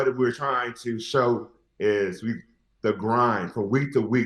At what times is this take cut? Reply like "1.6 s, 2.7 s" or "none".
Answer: none

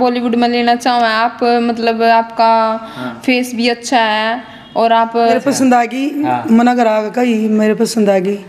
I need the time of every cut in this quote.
5.3 s

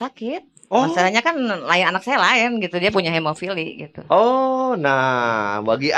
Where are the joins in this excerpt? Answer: none

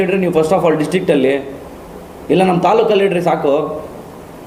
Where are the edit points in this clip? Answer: none

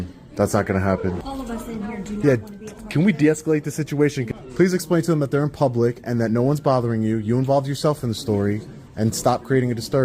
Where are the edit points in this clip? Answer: 1.2 s, 4.3 s

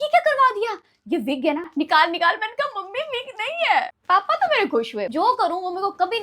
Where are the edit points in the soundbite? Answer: 1.7 s, 3.9 s, 5.1 s

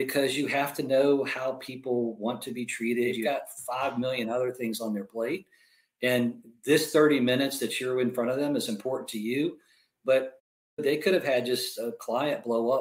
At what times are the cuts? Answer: 3.2 s

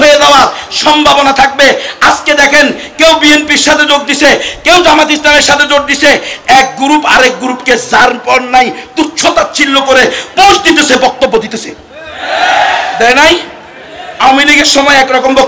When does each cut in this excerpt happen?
none

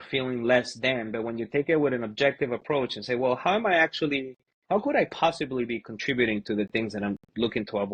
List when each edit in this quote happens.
none

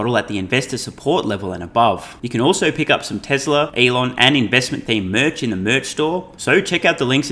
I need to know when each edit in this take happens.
2.2 s, 3.7 s, 6.3 s

